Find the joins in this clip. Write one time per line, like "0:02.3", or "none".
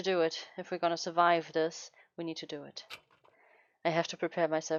none